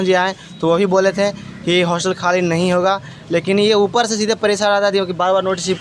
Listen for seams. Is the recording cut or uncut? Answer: uncut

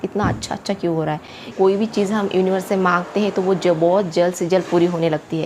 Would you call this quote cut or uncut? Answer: cut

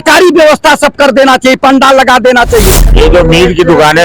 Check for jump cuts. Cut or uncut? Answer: cut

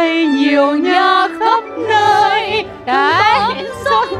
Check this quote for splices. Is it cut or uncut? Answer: uncut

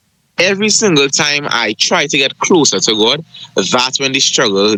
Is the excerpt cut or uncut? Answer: uncut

